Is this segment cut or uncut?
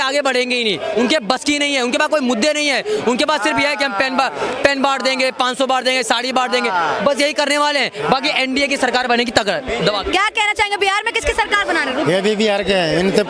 uncut